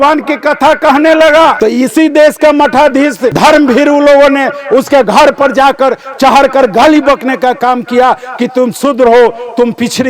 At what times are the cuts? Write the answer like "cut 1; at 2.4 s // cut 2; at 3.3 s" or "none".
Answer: cut 1; at 1.6 s // cut 2; at 3.3 s